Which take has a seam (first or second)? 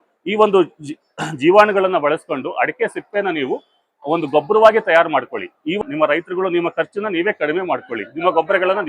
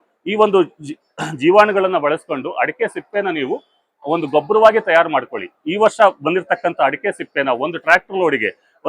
first